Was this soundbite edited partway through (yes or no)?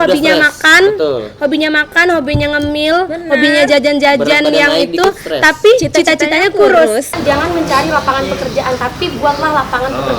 yes